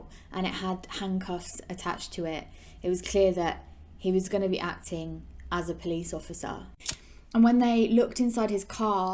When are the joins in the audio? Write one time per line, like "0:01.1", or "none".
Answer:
0:06.7